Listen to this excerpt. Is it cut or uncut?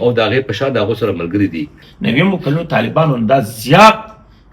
cut